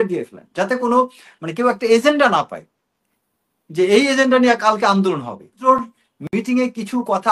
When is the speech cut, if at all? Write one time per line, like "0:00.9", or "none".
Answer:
0:05.6